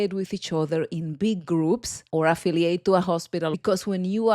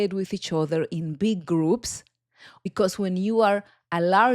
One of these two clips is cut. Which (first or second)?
second